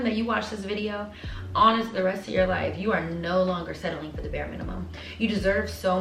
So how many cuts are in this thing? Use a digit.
0